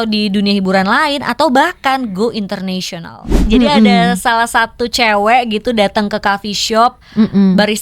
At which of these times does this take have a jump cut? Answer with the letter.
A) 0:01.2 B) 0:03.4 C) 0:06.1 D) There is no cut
B